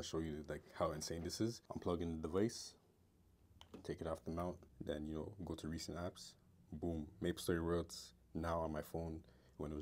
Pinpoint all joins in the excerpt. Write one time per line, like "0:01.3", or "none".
0:01.7
0:04.7